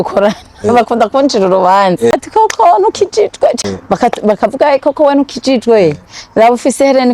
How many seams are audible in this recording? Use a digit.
2